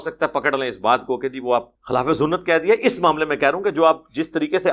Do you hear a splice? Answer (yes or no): yes